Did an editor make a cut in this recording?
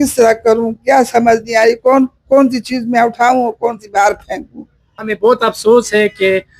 yes; 1 cut; at 5.1 s

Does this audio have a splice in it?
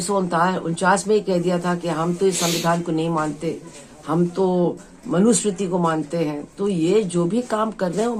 no; 0 cuts

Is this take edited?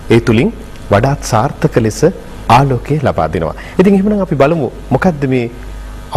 yes; 1 cut; at 3.6 s

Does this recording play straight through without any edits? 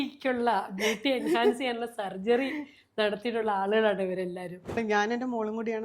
no; 1 cut; at 4.8 s

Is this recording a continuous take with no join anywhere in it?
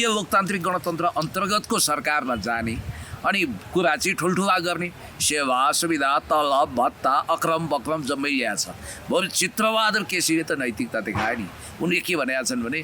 yes; 0 cuts

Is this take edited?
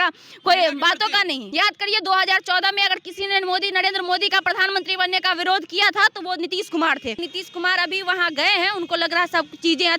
yes; 2 cuts; at 1.4 s, 7.2 s

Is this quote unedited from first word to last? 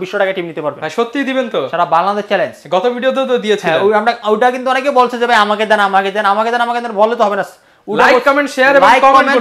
yes; 0 cuts

